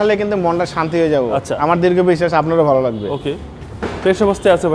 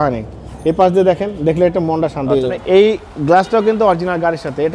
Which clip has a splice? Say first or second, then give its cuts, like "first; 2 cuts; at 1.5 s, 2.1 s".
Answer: second; 1 cut; at 2.5 s